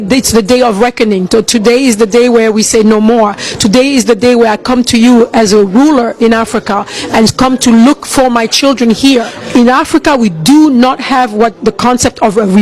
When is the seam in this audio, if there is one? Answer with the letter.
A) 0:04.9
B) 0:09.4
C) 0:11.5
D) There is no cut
B